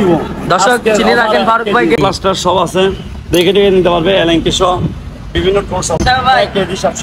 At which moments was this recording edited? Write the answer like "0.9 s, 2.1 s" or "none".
2.0 s, 6.0 s